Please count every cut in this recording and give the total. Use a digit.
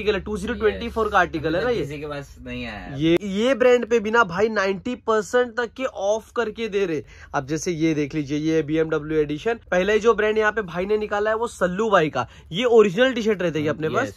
3